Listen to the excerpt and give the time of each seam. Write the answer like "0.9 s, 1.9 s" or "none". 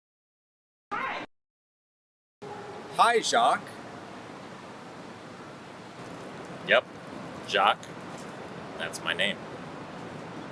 none